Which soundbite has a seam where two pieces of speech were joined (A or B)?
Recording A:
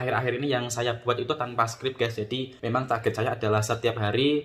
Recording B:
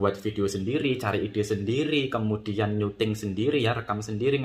A